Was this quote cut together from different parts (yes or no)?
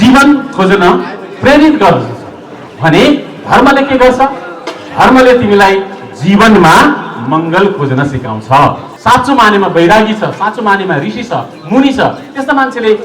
yes